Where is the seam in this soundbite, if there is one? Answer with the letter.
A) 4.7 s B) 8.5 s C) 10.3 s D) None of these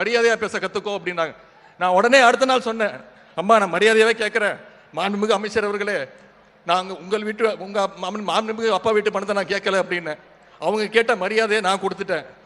D